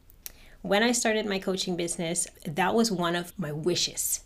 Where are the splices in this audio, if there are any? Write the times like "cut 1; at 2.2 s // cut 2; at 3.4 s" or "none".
none